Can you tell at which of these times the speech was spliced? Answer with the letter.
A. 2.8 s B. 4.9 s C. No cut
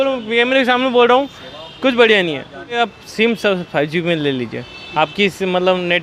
A